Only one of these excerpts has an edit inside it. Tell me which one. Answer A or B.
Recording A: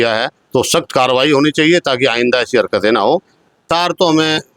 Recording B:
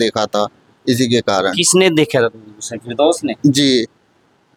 A